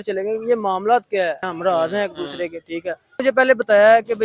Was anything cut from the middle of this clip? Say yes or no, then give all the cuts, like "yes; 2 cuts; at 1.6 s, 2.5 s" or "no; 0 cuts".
yes; 2 cuts; at 1.5 s, 3.2 s